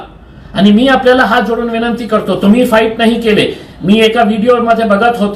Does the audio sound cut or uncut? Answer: uncut